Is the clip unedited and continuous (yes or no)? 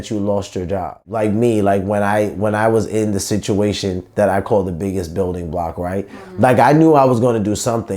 no